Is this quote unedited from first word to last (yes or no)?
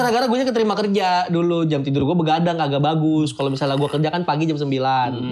yes